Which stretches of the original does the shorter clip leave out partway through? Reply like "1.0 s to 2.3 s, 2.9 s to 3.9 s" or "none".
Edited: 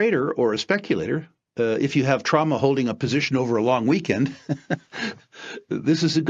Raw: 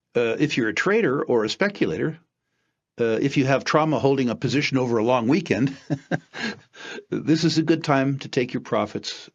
2.3 s to 2.8 s